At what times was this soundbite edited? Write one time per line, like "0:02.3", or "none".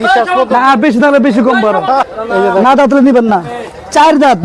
0:02.1

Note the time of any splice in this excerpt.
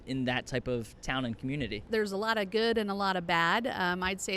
0:01.8

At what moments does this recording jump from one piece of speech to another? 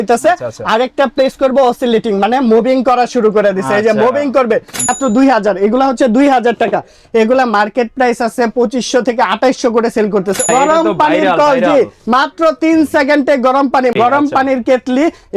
0:04.9
0:10.5
0:13.9

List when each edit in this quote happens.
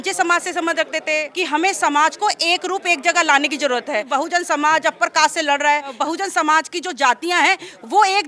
0:01.3
0:04.1
0:05.9

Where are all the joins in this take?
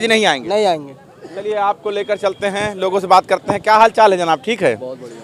none

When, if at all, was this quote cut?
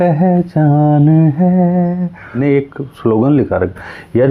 0:02.4

